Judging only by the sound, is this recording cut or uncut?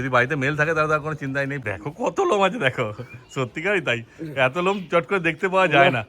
cut